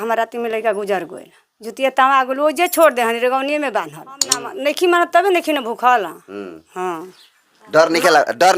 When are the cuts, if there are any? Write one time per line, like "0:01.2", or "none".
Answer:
0:04.4